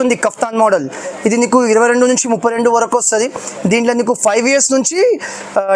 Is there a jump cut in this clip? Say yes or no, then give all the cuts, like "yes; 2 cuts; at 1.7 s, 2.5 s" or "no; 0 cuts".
no; 0 cuts